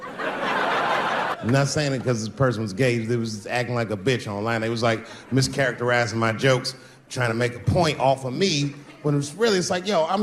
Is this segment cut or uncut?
cut